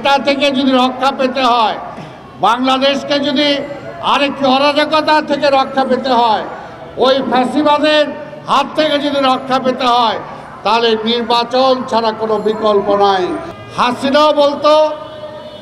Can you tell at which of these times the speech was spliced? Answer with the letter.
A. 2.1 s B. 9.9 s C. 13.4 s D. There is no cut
C